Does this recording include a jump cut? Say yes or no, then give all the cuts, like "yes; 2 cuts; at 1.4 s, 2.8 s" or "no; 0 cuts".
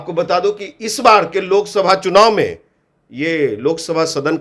no; 0 cuts